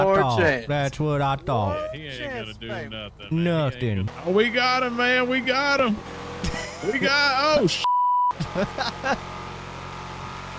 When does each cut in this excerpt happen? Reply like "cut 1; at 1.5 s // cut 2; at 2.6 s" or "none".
cut 1; at 4.1 s